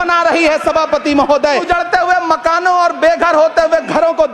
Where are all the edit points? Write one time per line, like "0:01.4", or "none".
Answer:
0:01.6